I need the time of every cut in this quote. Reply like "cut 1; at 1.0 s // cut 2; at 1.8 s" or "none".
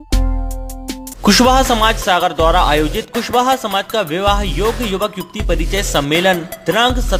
cut 1; at 1.1 s

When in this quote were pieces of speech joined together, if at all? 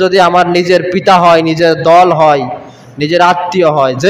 none

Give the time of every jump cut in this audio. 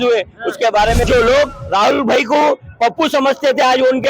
cut 1; at 1.0 s

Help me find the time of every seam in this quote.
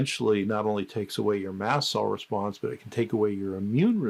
none

